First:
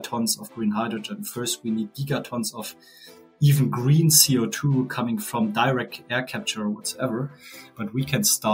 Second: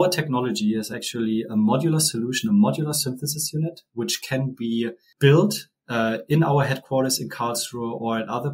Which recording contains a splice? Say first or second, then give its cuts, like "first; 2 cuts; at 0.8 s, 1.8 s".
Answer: second; 1 cut; at 5.0 s